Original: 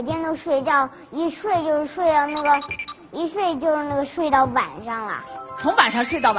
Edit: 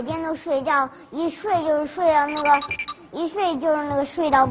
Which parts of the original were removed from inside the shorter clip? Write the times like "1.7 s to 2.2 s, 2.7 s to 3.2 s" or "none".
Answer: none

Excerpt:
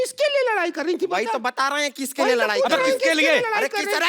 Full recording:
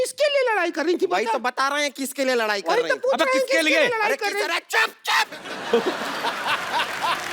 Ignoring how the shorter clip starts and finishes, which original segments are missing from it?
2.5 s to 3.0 s

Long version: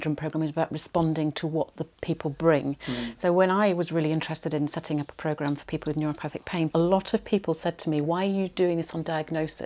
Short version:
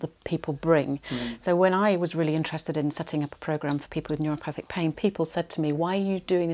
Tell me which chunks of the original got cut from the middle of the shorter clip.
6.7 s to 7.2 s

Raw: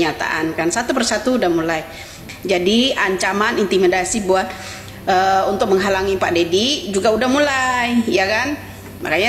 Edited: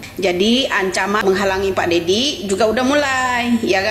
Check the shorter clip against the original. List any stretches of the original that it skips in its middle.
3.5 s to 5.7 s

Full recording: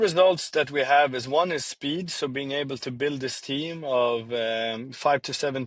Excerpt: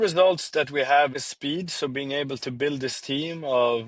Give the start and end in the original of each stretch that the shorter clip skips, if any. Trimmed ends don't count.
1.2 s to 1.6 s

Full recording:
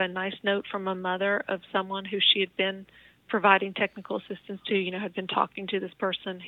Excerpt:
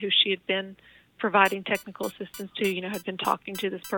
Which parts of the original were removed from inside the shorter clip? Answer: none

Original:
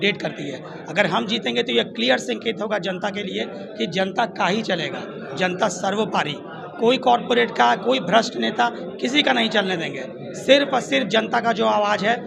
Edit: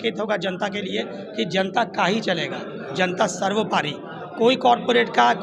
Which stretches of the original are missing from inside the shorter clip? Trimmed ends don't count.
none

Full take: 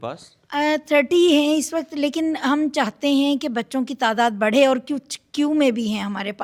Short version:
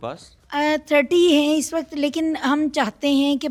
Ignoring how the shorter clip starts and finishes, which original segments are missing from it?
none

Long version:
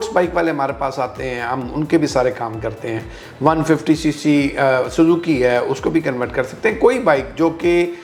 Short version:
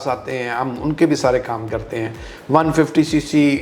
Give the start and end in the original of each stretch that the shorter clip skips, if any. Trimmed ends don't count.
none

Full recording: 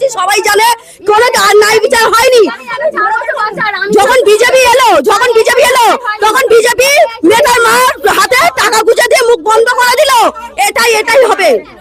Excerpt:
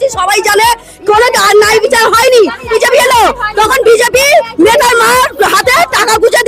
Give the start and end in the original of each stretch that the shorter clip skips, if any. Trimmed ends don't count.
2.7 s to 5.4 s

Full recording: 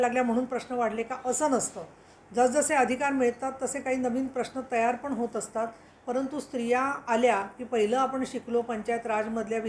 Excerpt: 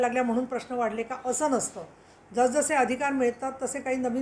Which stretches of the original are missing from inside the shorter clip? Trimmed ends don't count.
none

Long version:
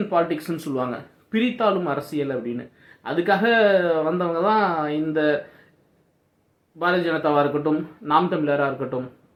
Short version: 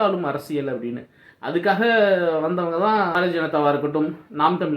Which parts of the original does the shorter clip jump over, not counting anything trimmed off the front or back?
4.8 s to 6.8 s

